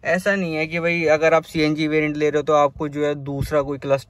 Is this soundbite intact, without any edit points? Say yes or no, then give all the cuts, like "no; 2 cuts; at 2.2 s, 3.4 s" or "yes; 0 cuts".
yes; 0 cuts